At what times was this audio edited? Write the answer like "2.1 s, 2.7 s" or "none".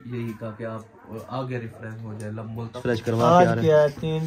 2.8 s